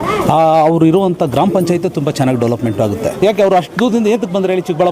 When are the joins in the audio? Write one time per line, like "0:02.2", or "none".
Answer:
0:03.2